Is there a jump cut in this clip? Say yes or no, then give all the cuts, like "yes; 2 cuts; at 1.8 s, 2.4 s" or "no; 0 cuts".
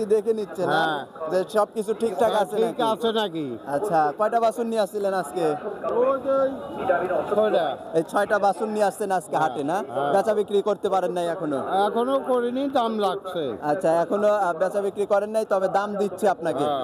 no; 0 cuts